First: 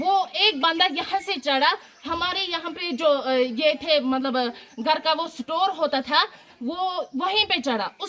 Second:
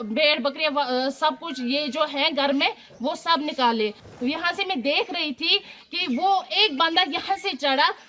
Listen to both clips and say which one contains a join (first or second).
second